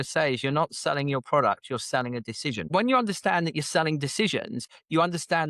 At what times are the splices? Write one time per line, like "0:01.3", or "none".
0:02.7